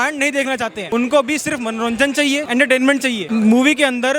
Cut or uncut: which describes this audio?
cut